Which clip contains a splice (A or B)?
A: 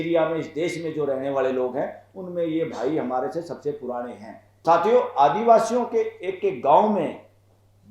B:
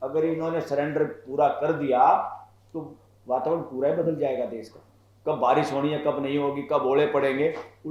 A